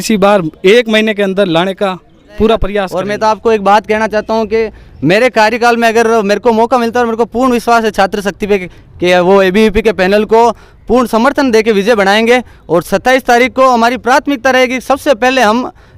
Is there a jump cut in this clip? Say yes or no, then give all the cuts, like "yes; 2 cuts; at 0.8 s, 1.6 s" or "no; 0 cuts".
yes; 1 cut; at 2.9 s